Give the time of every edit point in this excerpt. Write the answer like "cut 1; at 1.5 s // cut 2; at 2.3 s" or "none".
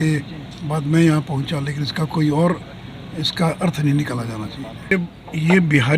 cut 1; at 4.9 s